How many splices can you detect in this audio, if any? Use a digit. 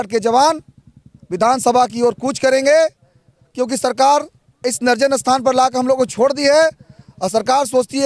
0